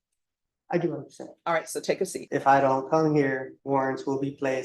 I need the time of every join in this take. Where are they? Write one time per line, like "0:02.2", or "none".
0:02.2
0:03.5